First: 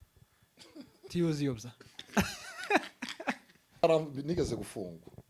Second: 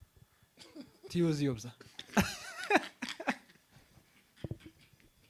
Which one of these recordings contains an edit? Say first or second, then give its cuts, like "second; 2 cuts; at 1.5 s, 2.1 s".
first; 1 cut; at 3.8 s